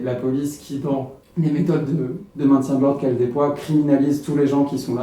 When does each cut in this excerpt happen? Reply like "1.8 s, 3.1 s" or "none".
1.2 s, 2.2 s

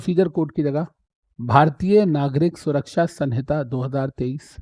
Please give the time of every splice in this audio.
none

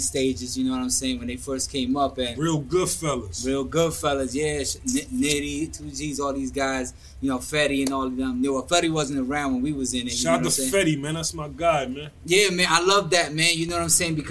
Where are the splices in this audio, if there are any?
none

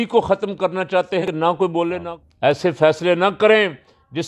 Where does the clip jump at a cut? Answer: 1.3 s, 2.1 s

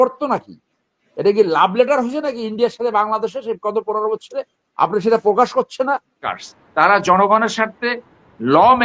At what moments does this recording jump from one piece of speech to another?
6.2 s

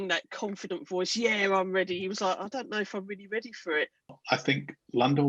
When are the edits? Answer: 4.2 s

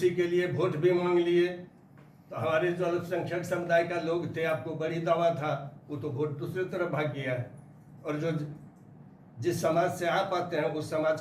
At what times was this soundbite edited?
none

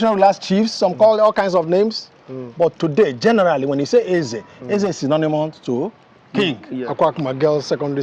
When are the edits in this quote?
6.8 s

